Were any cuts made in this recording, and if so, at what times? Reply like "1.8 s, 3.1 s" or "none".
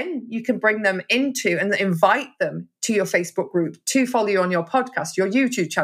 none